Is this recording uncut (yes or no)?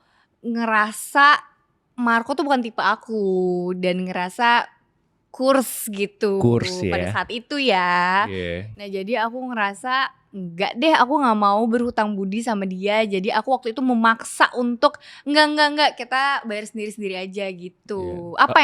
yes